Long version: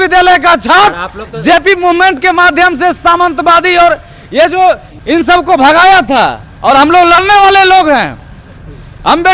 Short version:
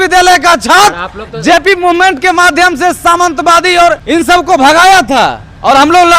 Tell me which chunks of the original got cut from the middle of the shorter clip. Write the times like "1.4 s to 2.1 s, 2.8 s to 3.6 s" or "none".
4.0 s to 5.0 s